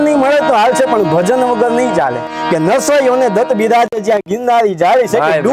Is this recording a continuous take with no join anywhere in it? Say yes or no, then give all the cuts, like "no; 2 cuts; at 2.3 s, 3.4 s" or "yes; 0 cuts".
no; 1 cut; at 2.3 s